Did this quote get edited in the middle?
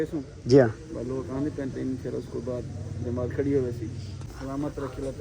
yes; 1 cut; at 4.3 s

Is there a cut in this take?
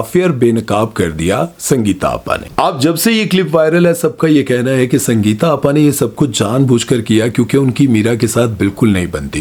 no; 0 cuts

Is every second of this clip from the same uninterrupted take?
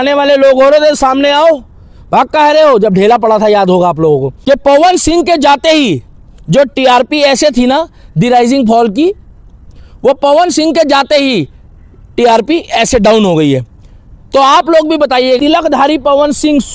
no; 2 cuts; at 4.3 s, 15.4 s

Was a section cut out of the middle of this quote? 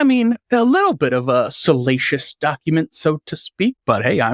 no; 0 cuts

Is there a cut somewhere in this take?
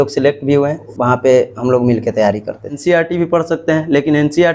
yes; 2 cuts; at 0.9 s, 2.8 s

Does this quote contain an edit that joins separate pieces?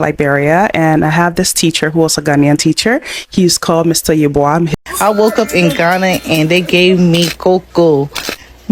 yes; 1 cut; at 4.8 s

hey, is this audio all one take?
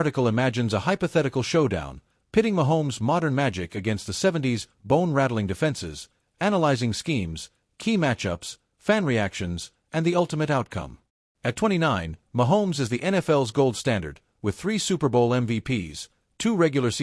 yes; 0 cuts

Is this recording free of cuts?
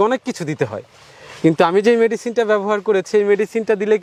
yes; 0 cuts

